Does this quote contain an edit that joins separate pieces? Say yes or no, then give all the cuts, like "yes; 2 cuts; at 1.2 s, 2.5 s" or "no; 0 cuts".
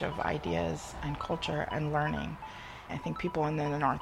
yes; 1 cut; at 2.9 s